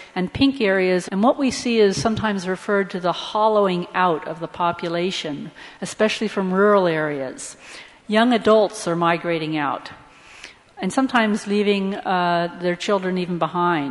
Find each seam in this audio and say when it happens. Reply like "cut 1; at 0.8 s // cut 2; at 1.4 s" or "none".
none